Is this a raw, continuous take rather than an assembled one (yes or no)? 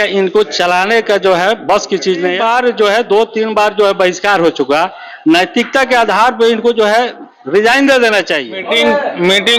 no